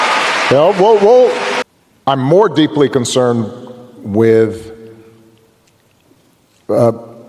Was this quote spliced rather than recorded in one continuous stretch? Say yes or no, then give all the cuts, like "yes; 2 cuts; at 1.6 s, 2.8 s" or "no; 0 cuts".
yes; 1 cut; at 1.6 s